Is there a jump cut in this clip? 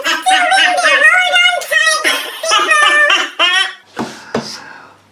no; 0 cuts

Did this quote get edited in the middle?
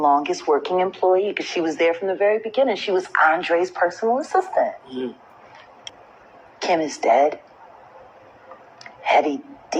yes; 1 cut; at 6.0 s

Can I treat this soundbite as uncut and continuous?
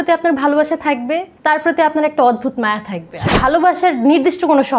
no; 2 cuts; at 1.3 s, 3.2 s

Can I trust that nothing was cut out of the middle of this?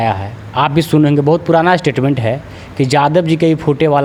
yes; 0 cuts

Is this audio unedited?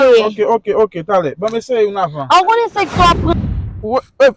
no; 1 cut; at 3.3 s

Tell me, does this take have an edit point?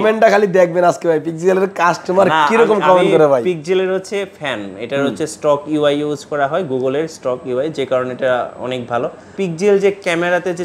yes; 1 cut; at 9.3 s

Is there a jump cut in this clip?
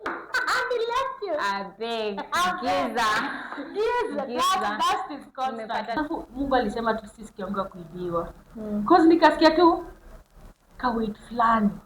yes; 1 cut; at 6.0 s

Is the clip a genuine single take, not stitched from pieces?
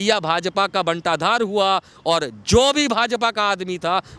yes; 0 cuts

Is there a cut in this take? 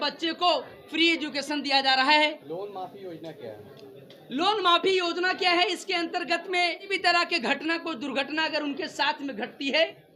yes; 2 cuts; at 2.4 s, 6.9 s

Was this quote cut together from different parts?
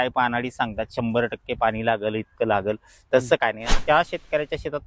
yes; 1 cut; at 3.8 s

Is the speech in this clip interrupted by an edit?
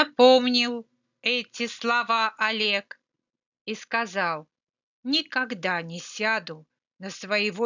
yes; 1 cut; at 1.3 s

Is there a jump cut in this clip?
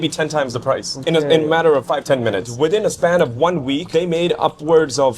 yes; 3 cuts; at 0.9 s, 2.2 s, 3.8 s

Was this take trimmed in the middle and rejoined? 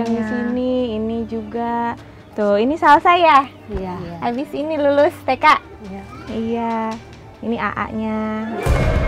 no; 0 cuts

